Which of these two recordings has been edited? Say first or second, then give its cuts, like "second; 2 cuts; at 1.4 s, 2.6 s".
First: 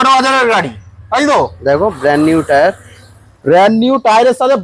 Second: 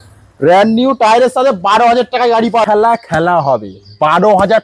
second; 1 cut; at 2.6 s